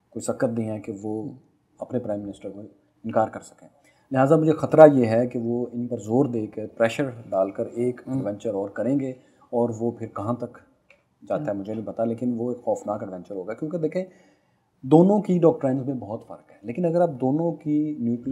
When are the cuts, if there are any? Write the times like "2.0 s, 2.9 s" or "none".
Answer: none